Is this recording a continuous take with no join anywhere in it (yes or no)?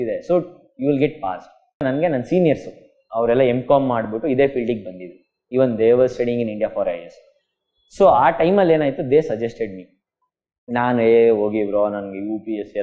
no